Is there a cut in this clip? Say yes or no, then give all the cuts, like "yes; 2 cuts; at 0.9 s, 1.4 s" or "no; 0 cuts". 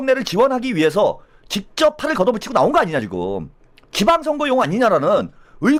no; 0 cuts